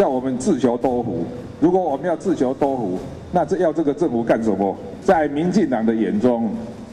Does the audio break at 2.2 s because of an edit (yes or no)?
no